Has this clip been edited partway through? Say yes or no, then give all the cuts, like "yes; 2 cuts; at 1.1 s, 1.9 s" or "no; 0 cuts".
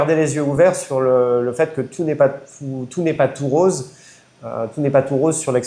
no; 0 cuts